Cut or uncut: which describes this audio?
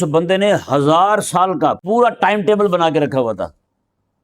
cut